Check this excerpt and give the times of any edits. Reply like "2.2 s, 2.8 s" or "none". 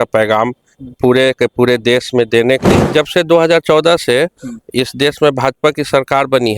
2.8 s